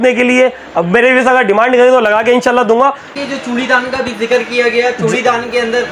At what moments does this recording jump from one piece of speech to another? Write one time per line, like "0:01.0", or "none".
0:03.2